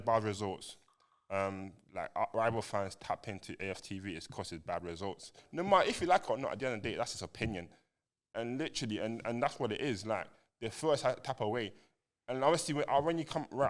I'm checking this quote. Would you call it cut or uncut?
cut